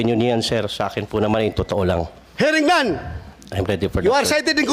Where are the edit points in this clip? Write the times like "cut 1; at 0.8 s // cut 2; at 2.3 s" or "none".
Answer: cut 1; at 2.2 s

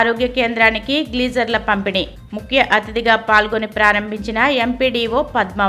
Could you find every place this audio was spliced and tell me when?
none

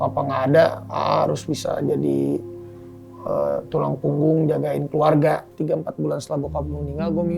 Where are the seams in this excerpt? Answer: cut 1; at 5.5 s

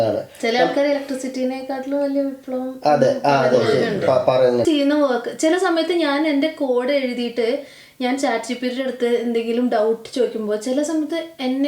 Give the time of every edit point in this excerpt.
cut 1; at 4.6 s

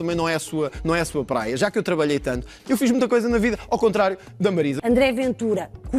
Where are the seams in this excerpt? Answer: cut 1; at 2.6 s // cut 2; at 4.8 s

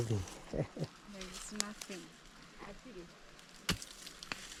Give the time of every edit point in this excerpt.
none

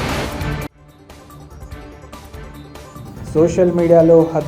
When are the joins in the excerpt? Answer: none

